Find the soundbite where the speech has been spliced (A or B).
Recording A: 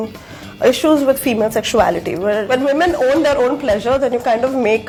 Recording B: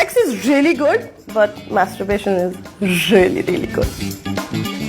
B